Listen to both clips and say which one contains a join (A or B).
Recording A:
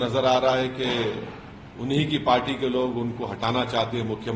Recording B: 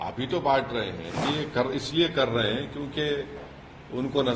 B